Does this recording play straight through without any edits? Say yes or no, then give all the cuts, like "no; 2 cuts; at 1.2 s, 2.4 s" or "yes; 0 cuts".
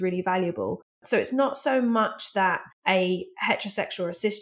no; 2 cuts; at 1.0 s, 2.7 s